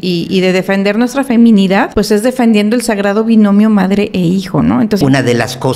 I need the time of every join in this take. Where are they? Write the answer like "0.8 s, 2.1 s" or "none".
1.9 s, 5.0 s